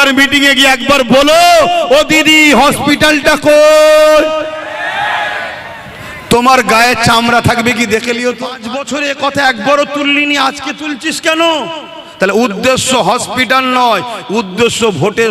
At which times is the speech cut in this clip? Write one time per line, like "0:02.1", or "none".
0:08.8